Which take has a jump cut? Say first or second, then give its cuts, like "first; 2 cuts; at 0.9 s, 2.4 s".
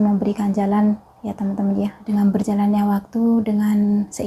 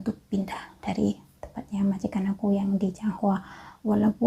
first; 1 cut; at 2.1 s